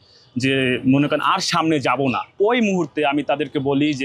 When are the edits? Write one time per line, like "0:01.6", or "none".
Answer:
0:02.3